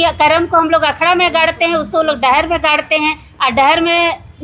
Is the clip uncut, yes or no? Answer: yes